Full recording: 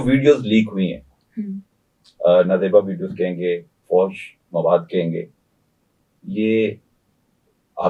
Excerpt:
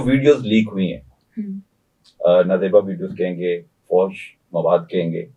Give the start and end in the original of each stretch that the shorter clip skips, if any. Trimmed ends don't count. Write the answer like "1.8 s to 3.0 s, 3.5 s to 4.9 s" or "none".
none